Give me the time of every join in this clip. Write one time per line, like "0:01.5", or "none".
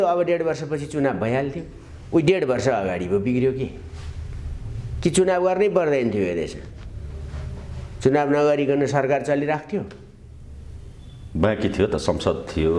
none